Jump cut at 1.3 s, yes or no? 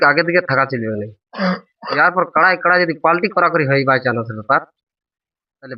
no